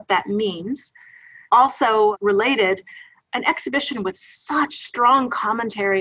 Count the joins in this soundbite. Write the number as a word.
one